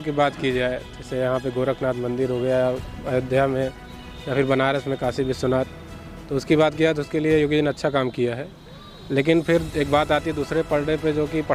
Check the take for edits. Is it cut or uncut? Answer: uncut